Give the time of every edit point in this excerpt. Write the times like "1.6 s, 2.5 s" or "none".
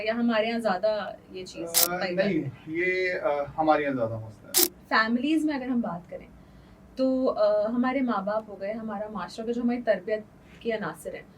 4.6 s